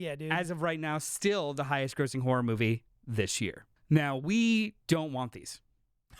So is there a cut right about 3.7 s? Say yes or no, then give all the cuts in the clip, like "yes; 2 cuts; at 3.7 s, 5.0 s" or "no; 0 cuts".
yes; 1 cut; at 3.7 s